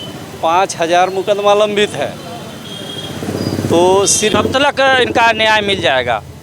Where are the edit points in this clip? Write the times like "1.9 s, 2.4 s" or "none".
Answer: 4.3 s